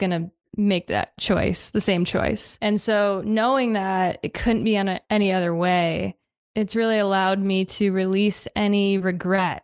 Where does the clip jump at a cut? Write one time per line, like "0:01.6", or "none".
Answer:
0:02.5